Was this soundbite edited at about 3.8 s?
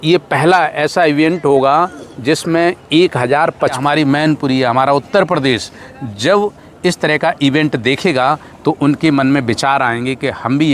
yes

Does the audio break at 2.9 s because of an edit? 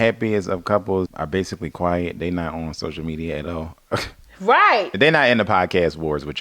no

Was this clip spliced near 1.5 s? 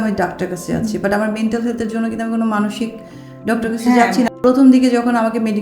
no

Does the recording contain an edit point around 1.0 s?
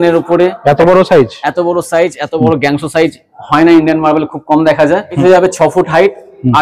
no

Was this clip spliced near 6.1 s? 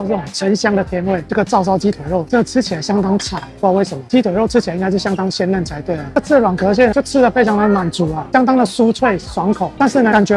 yes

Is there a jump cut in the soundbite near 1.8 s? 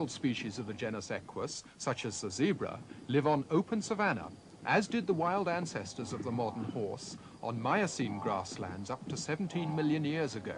no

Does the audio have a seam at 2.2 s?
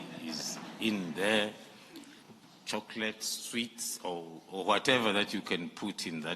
yes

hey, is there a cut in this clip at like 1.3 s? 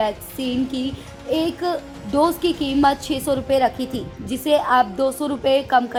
no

